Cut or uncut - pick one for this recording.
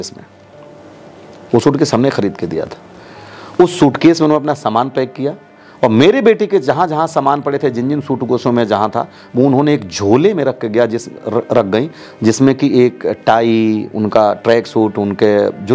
uncut